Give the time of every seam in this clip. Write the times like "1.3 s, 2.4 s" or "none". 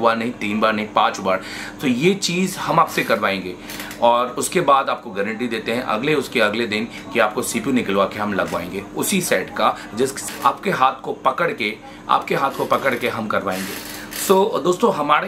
none